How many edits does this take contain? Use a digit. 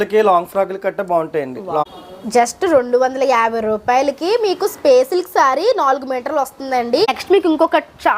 2